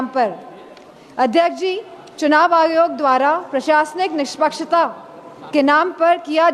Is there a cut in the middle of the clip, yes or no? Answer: no